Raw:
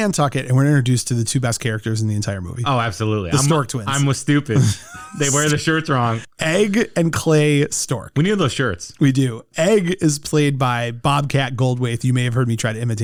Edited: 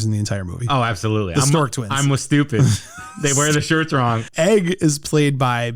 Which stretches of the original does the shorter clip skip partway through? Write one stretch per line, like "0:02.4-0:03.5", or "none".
0:06.2-0:09.5

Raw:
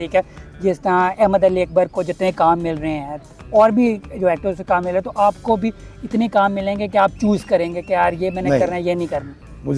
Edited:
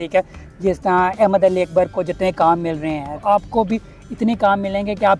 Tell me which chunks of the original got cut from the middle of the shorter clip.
0:03.2-0:05.1

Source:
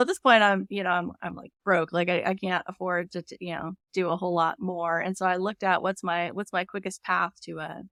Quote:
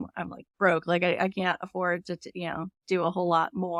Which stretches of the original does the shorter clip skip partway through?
none

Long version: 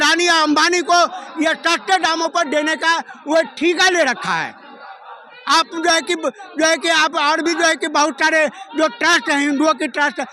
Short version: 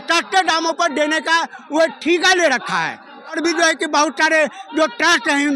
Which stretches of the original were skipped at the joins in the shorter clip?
0:04.9-0:07.4

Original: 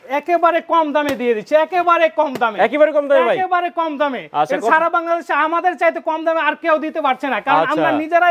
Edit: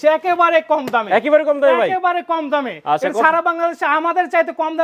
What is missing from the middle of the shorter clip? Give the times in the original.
none

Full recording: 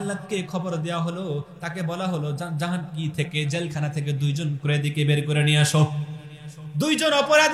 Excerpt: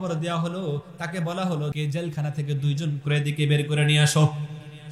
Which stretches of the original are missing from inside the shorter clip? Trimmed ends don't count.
0:02.4-0:03.3

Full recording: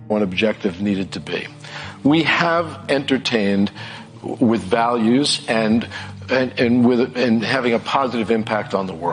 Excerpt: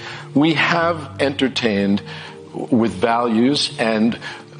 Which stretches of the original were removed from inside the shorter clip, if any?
none

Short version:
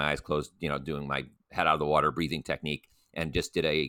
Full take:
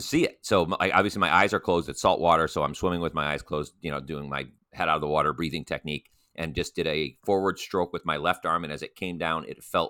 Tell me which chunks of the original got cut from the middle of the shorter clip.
none

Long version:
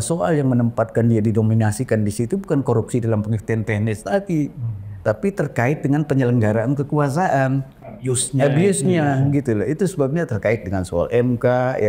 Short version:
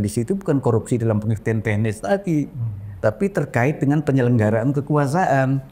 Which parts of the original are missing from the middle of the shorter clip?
none

